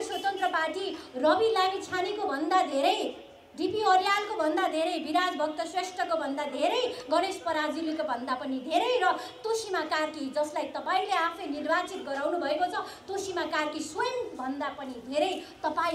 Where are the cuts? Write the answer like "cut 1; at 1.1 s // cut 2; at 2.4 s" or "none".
none